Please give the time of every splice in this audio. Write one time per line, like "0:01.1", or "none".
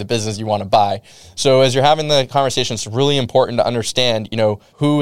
0:01.1